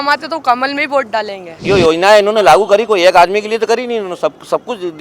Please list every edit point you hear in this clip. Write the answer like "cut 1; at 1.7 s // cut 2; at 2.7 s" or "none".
cut 1; at 1.6 s